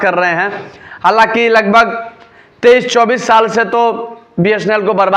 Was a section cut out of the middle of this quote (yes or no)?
no